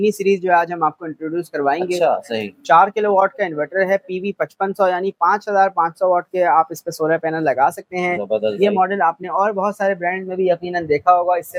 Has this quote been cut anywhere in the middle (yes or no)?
no